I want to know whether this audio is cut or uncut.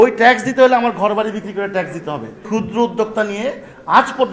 cut